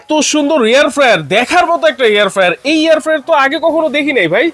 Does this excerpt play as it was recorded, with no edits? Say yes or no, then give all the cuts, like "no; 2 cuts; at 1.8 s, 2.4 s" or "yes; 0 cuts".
yes; 0 cuts